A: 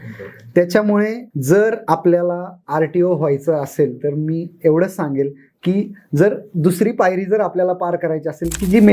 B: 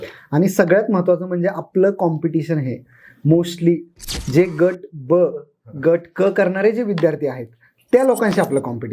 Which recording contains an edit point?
A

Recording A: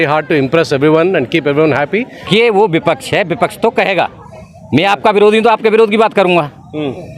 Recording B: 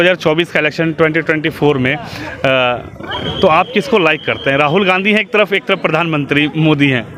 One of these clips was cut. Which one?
A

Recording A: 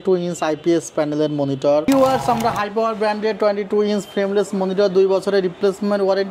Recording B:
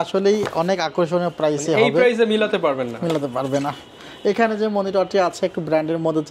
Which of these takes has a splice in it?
A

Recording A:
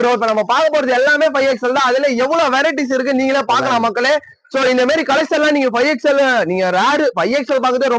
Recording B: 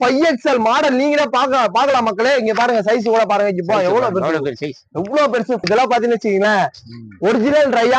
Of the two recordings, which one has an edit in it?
B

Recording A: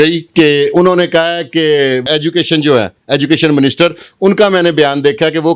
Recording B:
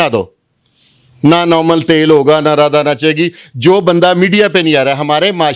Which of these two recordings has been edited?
A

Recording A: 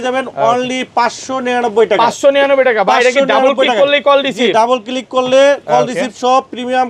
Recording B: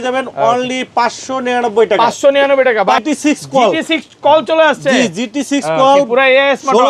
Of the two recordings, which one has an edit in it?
B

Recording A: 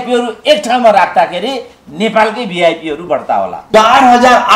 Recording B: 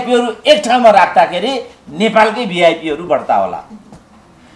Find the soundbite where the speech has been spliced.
A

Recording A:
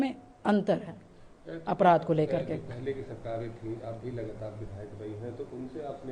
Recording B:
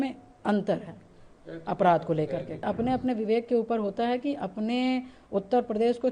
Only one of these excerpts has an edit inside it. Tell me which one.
B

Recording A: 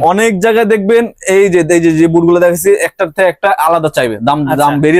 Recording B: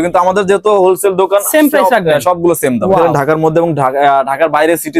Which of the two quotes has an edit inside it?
B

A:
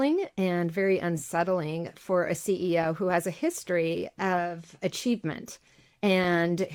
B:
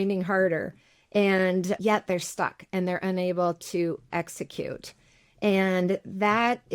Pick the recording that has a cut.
B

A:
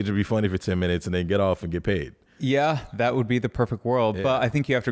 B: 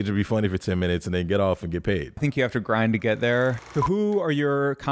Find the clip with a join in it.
B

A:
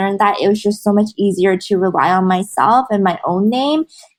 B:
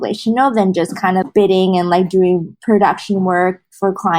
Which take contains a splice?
B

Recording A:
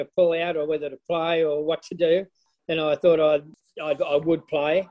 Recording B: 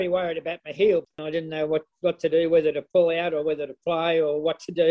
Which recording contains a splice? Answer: B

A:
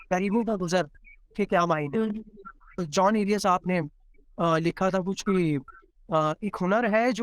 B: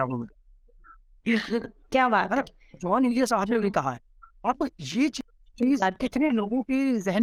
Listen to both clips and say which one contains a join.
A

